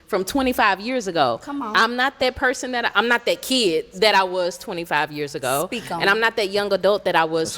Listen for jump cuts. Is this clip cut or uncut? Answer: uncut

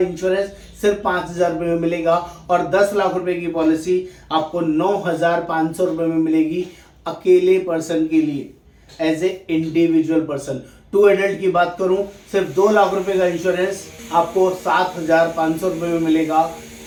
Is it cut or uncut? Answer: uncut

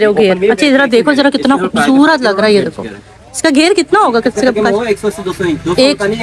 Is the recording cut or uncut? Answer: uncut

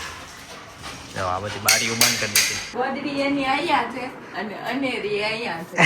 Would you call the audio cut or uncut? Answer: cut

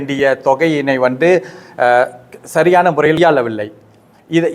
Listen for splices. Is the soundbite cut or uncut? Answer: cut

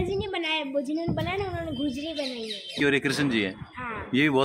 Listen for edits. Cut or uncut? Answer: cut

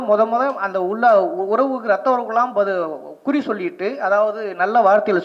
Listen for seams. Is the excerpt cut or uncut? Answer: uncut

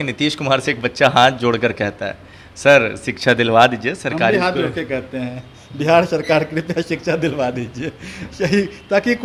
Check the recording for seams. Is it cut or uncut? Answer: uncut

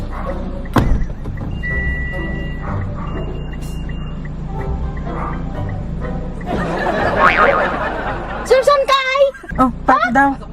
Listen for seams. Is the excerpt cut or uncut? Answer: cut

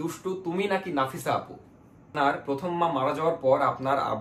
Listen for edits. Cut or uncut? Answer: cut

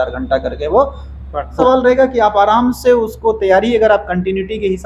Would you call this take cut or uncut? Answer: cut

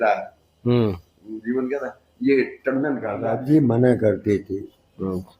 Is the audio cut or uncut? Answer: cut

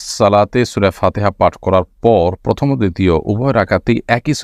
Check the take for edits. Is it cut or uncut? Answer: uncut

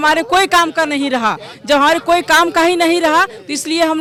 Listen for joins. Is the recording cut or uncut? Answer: uncut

